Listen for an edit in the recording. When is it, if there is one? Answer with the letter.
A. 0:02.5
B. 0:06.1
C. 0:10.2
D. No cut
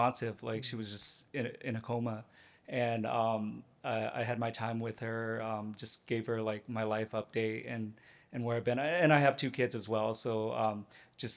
D